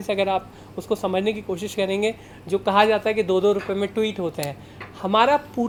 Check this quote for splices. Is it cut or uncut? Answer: uncut